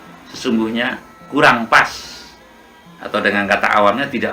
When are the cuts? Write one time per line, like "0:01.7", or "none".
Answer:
none

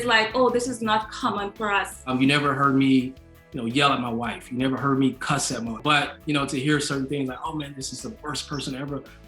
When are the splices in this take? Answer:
0:02.0
0:05.8

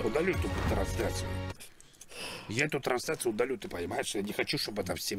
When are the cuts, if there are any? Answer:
none

